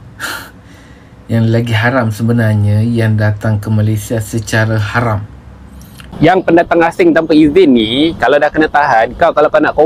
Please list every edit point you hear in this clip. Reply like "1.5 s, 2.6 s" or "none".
6.1 s

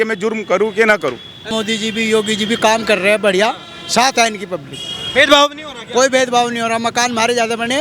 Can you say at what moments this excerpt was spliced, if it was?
1.5 s

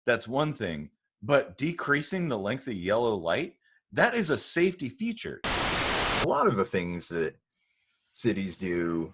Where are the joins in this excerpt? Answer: 5.8 s

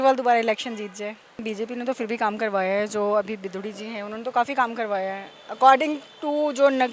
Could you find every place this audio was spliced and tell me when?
1.4 s

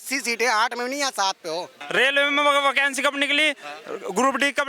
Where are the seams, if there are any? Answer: 1.8 s

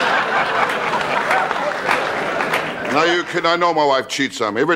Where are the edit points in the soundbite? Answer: none

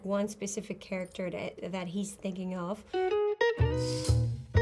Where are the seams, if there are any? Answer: 2.8 s

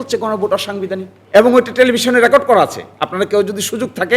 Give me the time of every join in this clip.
1.1 s

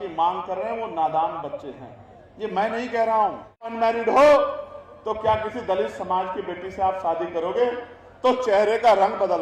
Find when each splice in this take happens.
3.6 s

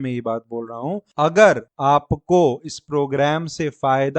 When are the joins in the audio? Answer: 1.0 s, 1.7 s

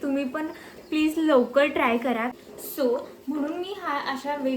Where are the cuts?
2.3 s

